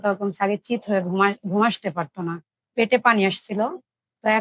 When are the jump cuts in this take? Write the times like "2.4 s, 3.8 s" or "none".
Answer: none